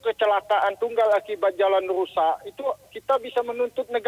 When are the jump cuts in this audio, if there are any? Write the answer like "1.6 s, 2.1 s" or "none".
none